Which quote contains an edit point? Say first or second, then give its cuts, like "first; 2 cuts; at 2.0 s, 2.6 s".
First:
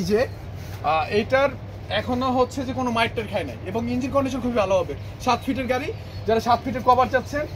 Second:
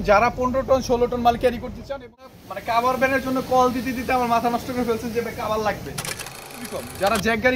second; 2 cuts; at 2.4 s, 6.4 s